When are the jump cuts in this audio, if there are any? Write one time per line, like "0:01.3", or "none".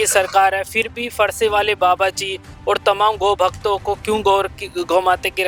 none